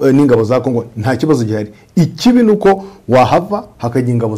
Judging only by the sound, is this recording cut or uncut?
uncut